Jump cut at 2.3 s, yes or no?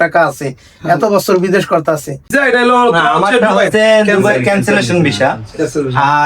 yes